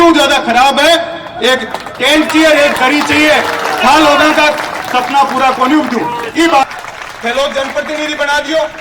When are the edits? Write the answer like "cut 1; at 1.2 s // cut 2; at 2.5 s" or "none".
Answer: cut 1; at 6.6 s